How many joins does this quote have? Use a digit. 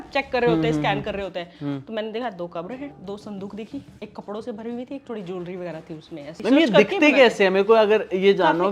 3